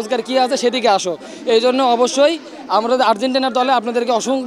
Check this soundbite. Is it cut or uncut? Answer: uncut